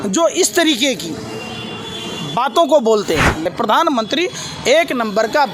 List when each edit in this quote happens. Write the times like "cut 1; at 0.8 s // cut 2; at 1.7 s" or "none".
cut 1; at 3.5 s